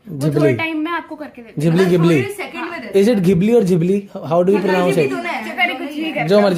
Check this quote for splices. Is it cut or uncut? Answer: uncut